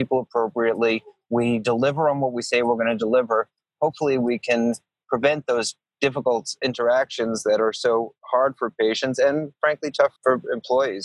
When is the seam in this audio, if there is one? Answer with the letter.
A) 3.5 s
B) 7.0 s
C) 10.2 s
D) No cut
C